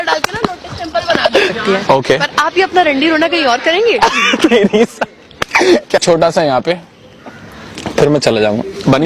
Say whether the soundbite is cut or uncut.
cut